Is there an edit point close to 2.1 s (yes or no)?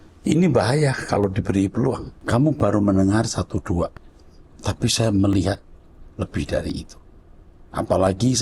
yes